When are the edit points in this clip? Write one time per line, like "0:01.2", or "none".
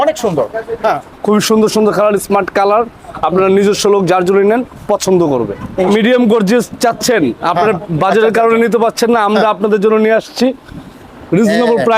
0:01.1
0:05.9

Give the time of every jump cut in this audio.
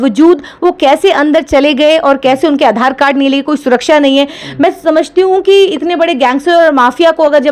none

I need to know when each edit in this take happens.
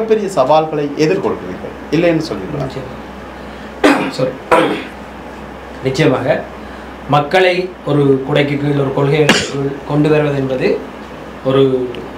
none

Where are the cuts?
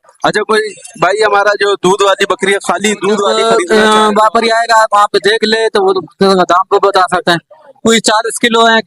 0:03.4

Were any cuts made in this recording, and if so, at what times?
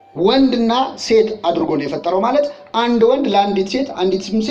none

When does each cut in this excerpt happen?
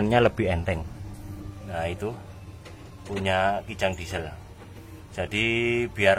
none

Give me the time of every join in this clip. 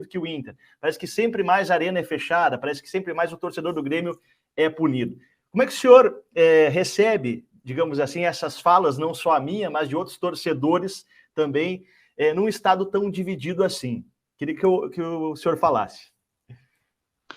none

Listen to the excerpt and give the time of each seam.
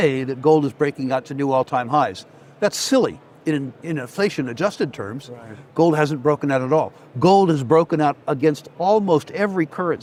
none

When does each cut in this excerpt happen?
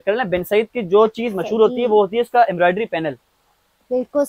none

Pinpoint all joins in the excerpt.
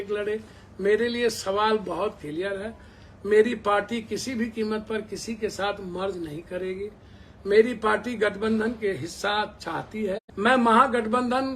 0:10.3

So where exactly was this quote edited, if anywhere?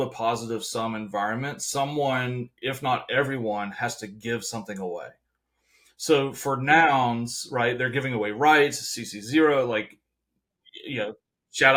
none

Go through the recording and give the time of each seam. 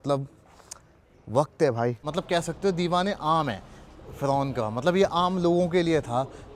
0:02.0

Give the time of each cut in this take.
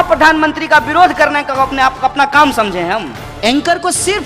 0:03.2

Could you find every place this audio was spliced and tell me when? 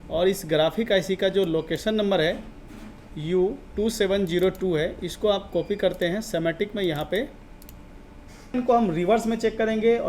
0:08.5

